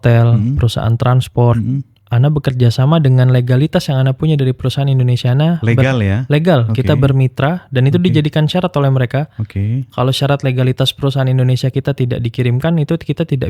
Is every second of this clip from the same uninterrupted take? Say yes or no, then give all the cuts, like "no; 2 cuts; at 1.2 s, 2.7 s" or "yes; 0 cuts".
yes; 0 cuts